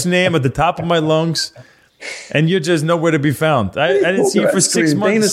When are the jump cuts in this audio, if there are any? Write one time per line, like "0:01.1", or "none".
none